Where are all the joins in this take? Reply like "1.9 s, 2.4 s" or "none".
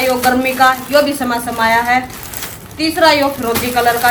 none

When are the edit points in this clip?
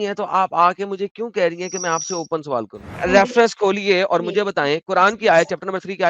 2.9 s

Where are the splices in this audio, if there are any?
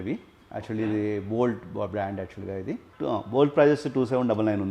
3.1 s

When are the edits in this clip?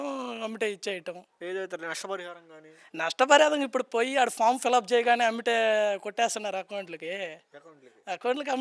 none

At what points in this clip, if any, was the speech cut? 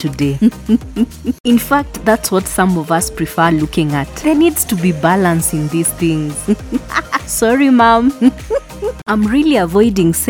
1.4 s, 9.0 s

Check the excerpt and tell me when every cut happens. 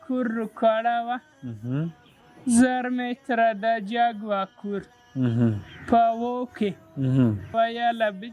none

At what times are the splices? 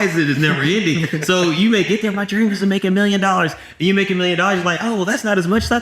none

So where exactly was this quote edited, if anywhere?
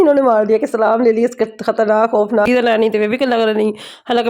2.5 s

